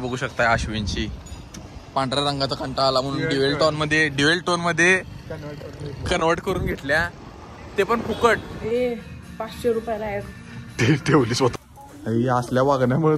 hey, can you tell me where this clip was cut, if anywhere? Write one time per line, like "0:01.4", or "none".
0:08.5
0:11.5